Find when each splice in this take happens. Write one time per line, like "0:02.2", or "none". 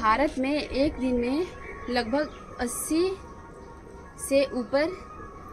none

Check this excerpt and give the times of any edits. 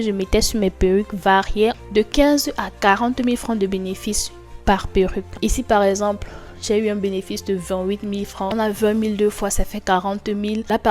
0:01.8
0:05.4
0:08.5

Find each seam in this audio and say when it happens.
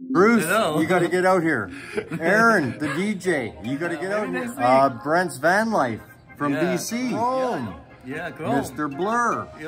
0:04.2
0:07.2

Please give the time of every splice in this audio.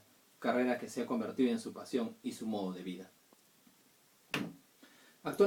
0:03.9

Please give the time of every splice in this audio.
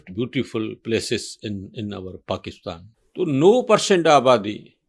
0:02.9

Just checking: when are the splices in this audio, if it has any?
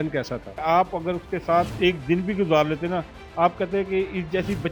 none

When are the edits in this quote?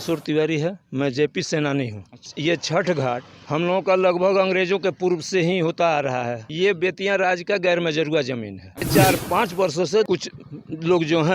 0:02.2
0:06.4
0:08.8
0:10.1

